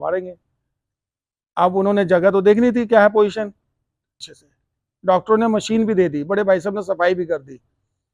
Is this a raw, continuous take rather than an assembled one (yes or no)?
no